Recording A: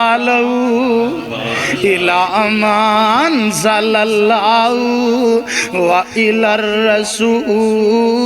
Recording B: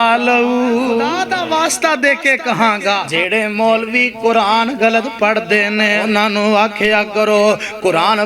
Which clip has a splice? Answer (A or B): B